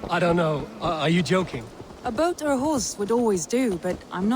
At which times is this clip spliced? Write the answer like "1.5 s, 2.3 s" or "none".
1.6 s